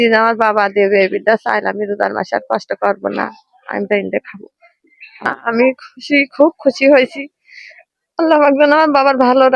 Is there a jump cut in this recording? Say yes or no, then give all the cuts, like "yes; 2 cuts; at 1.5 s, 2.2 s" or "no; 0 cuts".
yes; 1 cut; at 5.3 s